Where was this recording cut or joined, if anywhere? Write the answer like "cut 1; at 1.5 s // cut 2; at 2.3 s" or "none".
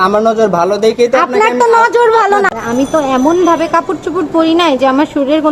cut 1; at 2.5 s